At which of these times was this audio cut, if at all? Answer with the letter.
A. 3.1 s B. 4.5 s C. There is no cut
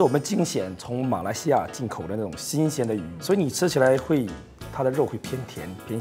A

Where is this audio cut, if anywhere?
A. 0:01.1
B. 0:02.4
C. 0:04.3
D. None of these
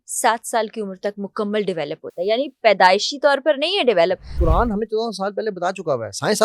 C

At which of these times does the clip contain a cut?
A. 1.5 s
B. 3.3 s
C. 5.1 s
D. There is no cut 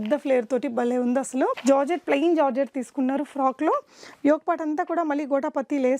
A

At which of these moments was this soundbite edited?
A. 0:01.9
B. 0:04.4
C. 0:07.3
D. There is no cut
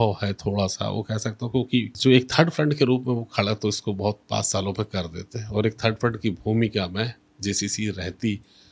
A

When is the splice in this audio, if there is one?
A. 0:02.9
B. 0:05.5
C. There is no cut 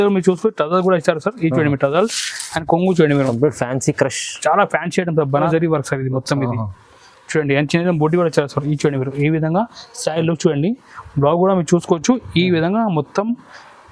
B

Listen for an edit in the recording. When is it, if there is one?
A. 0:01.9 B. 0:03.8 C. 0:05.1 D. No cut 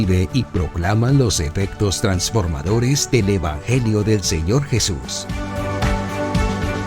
C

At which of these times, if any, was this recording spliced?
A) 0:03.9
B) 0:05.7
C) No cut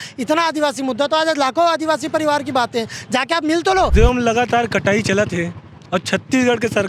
A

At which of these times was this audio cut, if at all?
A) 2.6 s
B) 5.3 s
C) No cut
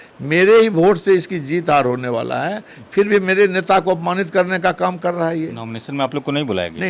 C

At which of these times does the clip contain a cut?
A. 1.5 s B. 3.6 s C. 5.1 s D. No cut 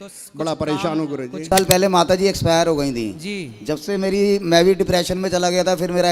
A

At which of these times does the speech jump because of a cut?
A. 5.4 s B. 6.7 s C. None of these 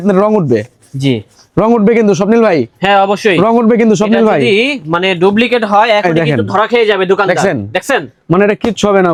C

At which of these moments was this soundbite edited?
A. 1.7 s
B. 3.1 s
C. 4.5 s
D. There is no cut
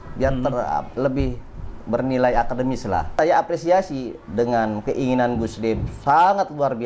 B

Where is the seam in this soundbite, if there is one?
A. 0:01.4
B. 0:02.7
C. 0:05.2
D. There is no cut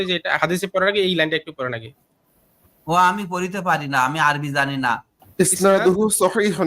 C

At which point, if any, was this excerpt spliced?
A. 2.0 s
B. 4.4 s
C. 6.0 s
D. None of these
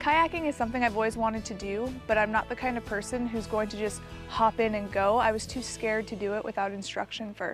D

